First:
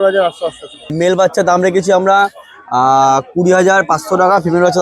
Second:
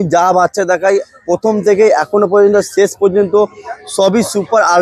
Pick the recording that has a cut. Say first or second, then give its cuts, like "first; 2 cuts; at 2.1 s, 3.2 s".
first; 1 cut; at 0.9 s